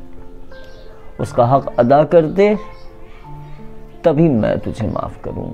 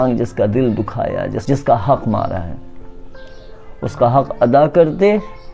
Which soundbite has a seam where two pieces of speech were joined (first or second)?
second